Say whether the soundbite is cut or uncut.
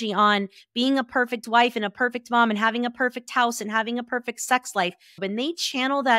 cut